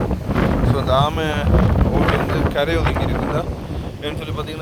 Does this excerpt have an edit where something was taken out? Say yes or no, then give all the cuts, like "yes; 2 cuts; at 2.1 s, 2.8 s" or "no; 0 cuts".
no; 0 cuts